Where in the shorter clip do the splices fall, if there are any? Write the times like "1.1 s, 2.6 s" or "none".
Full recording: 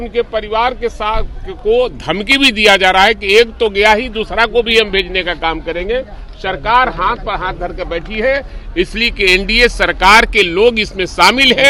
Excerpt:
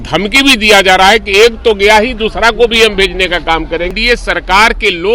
3.9 s

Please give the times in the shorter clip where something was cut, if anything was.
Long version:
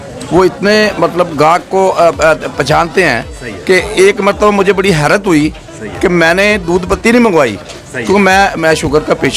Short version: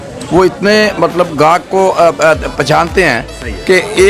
none

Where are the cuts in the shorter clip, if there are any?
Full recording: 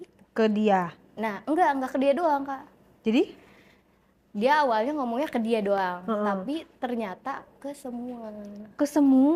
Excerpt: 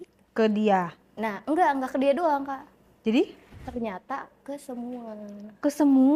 3.6 s

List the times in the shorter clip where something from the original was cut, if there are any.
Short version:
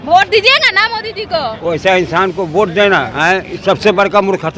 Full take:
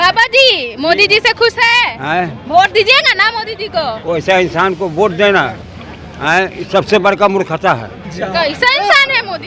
3.1 s

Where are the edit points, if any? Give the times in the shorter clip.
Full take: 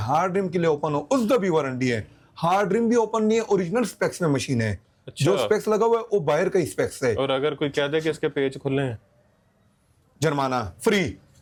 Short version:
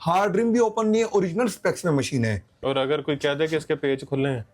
2.6 s

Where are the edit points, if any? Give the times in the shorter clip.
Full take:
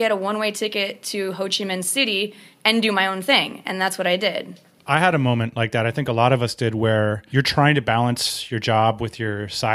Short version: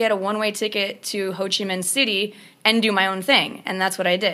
none

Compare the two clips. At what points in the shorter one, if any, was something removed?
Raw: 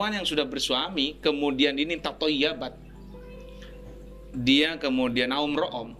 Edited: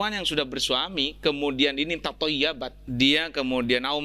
2.7 s

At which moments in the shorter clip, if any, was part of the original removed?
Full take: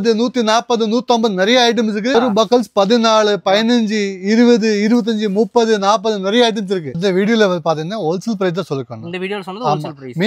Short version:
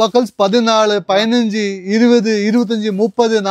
none

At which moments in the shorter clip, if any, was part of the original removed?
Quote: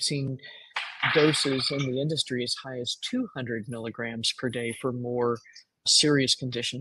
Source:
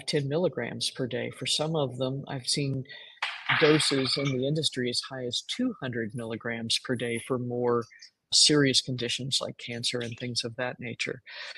none

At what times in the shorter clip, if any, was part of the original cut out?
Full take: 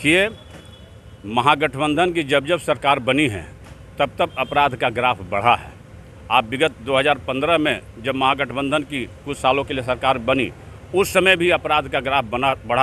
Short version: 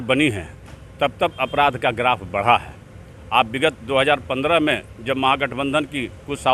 none

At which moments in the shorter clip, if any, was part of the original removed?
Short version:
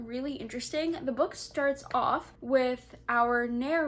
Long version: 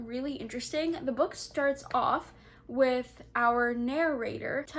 2.3 s

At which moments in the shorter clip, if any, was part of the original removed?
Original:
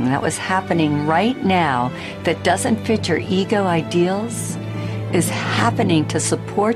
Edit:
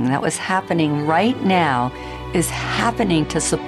2.1 s

